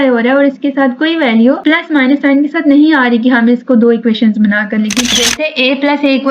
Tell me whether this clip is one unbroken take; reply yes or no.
no